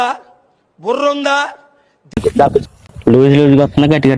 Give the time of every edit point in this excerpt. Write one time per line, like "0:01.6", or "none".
0:02.9